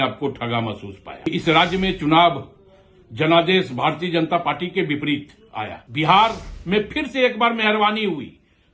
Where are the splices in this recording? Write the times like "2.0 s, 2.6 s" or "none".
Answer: 1.3 s, 5.8 s